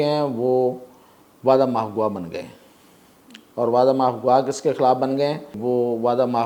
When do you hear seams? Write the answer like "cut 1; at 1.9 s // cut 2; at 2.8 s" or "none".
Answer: cut 1; at 5.5 s